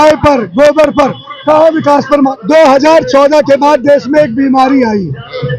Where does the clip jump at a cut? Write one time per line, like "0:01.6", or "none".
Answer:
0:02.3